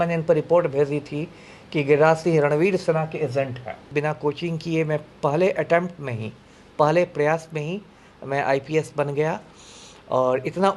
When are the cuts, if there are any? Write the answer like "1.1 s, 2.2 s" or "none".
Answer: 3.9 s

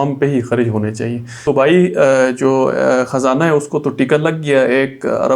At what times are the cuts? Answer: 1.4 s

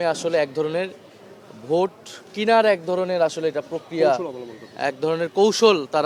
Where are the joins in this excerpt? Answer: none

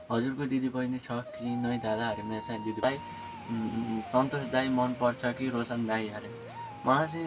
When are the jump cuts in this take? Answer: 2.8 s

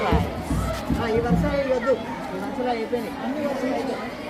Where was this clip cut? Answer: none

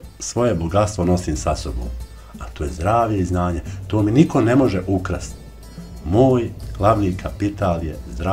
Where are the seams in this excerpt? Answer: none

